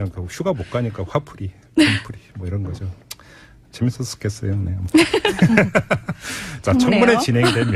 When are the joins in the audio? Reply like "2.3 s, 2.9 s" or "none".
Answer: none